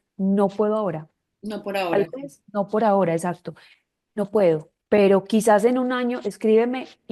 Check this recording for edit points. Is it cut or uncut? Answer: uncut